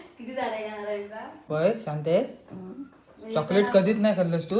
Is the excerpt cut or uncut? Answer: cut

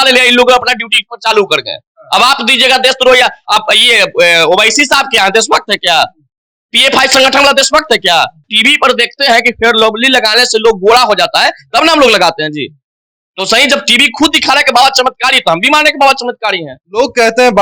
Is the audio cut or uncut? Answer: cut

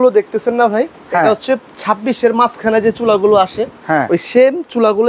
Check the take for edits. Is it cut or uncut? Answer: uncut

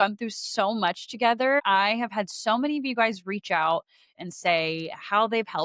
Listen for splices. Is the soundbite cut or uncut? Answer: cut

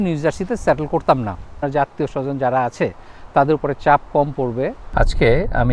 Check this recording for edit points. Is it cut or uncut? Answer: cut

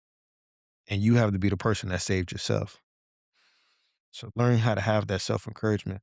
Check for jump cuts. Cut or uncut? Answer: uncut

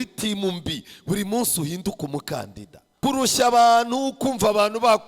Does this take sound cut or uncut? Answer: cut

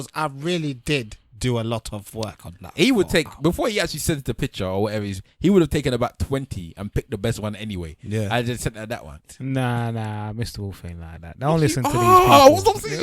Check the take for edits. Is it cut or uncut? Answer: cut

